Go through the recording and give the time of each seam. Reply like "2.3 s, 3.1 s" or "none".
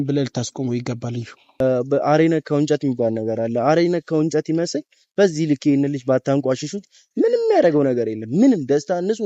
1.4 s